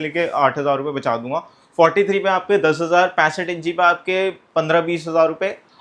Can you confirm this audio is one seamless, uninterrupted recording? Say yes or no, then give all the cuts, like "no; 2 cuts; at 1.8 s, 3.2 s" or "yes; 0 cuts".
yes; 0 cuts